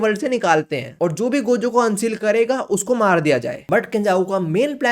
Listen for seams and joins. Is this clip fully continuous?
no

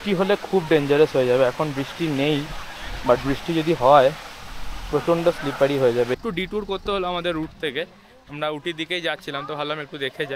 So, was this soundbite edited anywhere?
yes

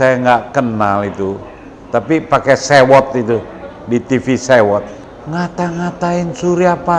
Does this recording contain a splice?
no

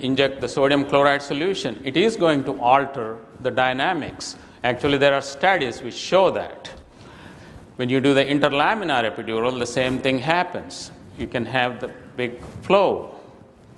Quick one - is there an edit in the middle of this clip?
no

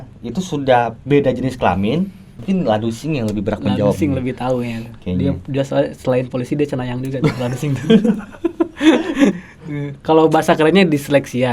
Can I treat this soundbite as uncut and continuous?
no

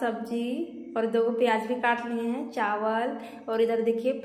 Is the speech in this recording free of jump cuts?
yes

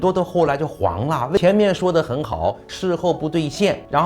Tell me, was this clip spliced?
yes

